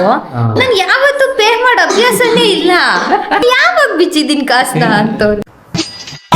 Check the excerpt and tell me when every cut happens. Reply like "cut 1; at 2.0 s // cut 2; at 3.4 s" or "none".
cut 1; at 3.4 s